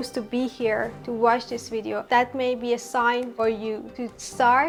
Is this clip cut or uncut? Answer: uncut